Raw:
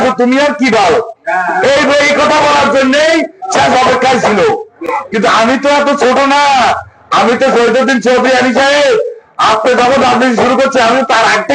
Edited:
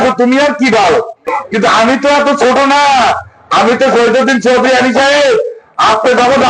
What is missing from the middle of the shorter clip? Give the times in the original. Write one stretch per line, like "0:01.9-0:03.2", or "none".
0:01.2-0:04.8